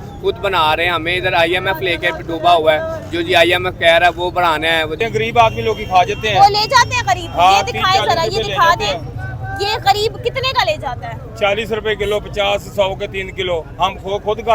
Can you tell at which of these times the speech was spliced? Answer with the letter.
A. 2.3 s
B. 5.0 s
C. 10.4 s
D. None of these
B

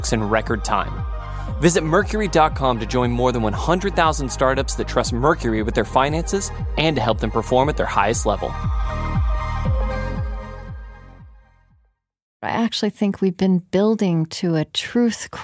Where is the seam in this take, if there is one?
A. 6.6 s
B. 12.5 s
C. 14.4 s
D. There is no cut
B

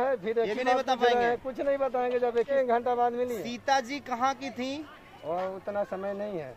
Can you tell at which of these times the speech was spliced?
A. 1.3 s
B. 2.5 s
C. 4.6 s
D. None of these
B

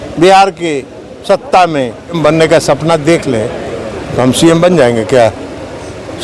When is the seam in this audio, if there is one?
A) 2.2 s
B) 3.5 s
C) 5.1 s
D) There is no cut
A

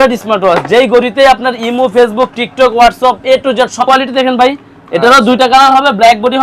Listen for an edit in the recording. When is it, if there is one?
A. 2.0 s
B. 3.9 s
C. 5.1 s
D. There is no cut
B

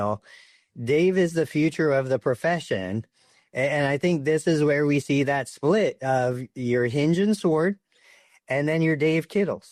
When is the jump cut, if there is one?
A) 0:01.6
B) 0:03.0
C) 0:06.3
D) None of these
D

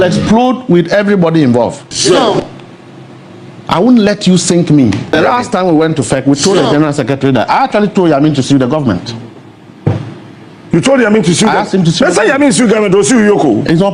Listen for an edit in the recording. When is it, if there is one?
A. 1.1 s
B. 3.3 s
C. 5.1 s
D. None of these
C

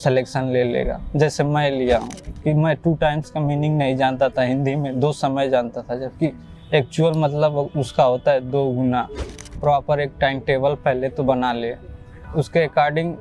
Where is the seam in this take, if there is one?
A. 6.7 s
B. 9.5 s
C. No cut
B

